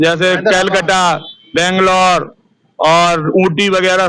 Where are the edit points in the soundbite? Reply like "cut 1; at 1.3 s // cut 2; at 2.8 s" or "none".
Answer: none

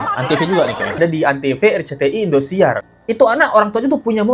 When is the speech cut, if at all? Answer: cut 1; at 1.0 s // cut 2; at 2.9 s

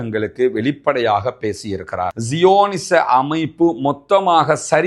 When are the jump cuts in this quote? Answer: cut 1; at 2.1 s

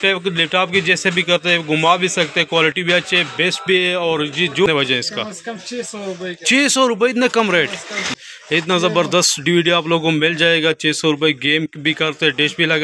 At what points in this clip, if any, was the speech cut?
cut 1; at 4.7 s // cut 2; at 8.1 s

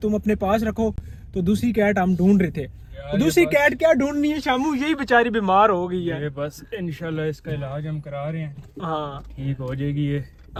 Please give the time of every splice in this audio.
none

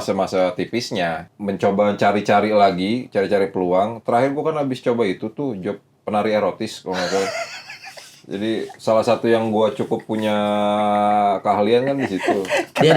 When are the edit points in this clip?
cut 1; at 1.3 s

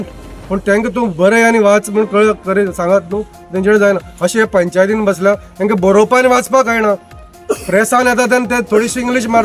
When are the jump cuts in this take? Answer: none

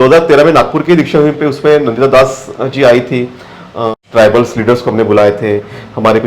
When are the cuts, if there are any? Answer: cut 1; at 3.9 s

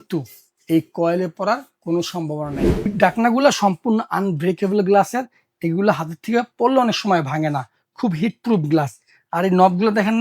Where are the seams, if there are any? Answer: cut 1; at 2.9 s

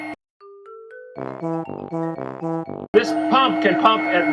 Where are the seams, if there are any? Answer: cut 1; at 2.9 s

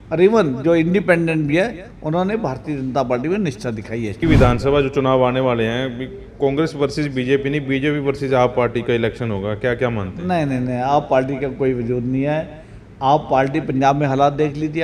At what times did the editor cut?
cut 1; at 4.2 s

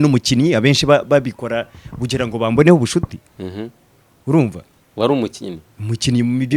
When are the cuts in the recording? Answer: none

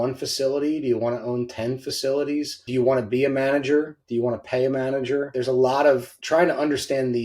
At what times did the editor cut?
cut 1; at 2.6 s // cut 2; at 5.3 s // cut 3; at 6.1 s

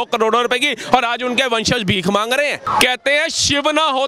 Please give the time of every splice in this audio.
cut 1; at 2.6 s

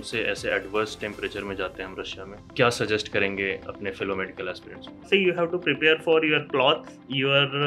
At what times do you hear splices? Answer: cut 1; at 2.5 s // cut 2; at 5.0 s

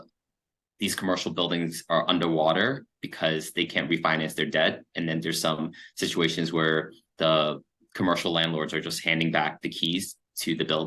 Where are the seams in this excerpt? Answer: none

